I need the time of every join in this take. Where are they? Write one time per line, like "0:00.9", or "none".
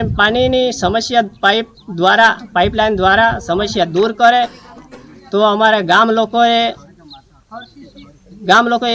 none